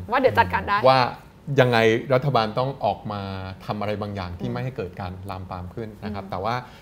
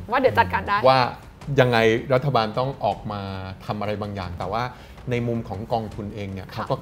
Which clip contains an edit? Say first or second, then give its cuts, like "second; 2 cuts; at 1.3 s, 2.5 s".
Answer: second; 1 cut; at 4.3 s